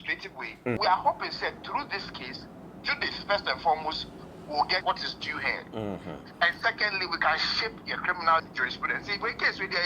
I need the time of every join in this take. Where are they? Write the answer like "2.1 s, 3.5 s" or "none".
0.8 s, 4.8 s, 8.5 s